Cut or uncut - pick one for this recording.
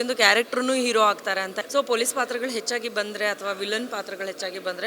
cut